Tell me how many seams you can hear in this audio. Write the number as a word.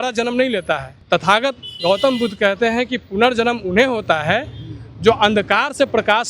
one